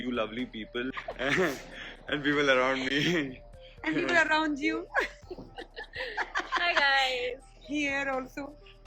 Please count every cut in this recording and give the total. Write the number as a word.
one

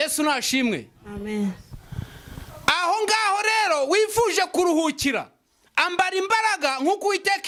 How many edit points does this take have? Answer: zero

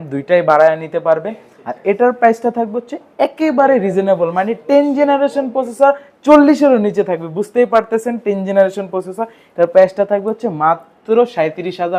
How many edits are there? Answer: zero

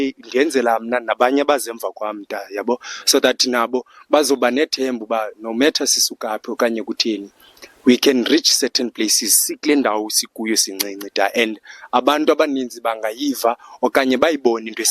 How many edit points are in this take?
zero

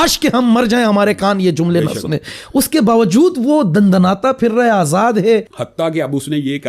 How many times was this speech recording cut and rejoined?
one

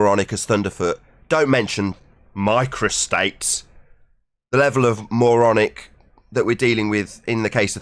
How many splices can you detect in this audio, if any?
zero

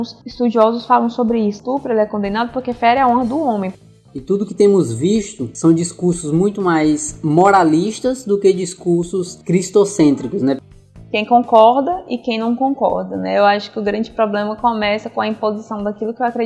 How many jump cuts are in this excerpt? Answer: two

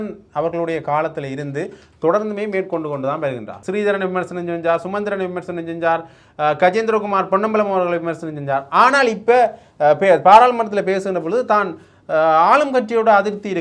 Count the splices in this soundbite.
one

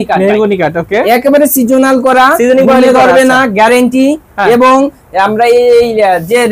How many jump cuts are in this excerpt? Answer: zero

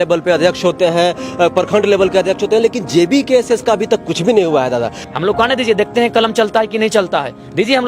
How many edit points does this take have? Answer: one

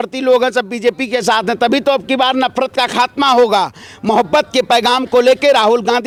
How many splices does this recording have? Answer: zero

